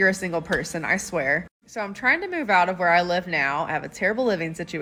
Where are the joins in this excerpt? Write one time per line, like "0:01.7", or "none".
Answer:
none